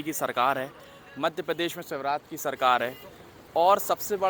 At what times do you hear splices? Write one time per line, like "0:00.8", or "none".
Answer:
none